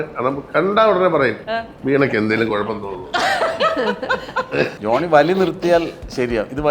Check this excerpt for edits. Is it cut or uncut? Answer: cut